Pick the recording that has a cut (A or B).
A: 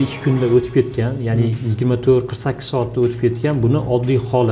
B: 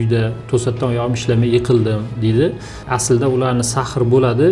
B